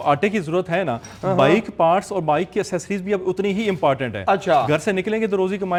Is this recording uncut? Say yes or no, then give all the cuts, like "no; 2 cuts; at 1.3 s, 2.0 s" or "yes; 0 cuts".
yes; 0 cuts